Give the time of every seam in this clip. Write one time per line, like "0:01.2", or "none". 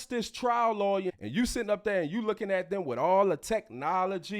0:01.1